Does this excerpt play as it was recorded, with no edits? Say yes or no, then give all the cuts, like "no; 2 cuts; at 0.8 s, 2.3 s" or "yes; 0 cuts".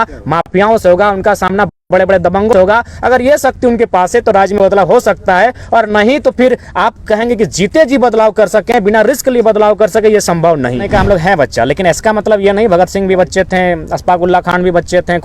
no; 1 cut; at 10.8 s